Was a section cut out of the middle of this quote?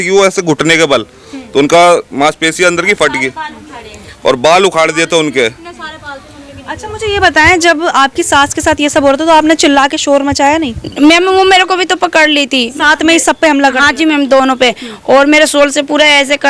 no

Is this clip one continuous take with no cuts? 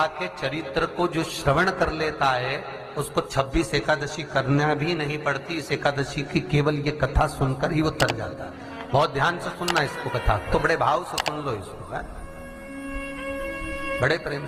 yes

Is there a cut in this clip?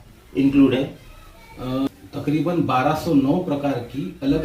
yes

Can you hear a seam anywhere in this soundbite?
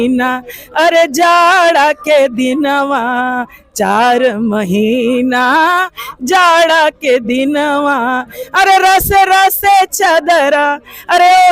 no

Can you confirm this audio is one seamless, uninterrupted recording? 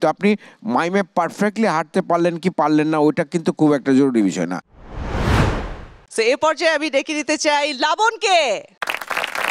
yes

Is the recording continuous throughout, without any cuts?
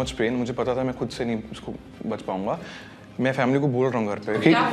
yes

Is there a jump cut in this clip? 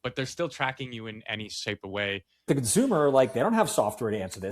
yes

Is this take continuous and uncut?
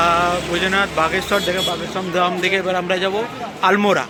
yes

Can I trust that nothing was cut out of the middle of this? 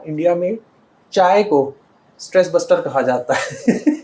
yes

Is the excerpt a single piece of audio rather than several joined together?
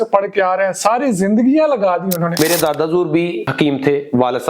no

